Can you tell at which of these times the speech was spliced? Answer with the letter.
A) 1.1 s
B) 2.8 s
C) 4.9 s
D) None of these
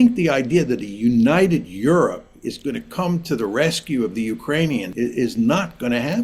C